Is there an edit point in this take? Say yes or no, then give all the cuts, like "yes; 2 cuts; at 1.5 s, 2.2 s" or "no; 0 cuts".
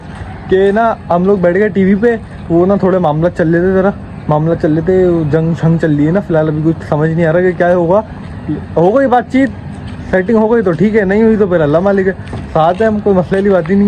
no; 0 cuts